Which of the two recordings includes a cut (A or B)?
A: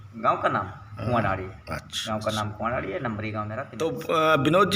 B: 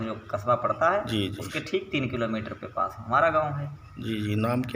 A